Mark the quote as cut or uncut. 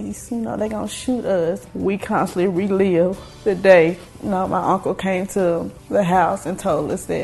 cut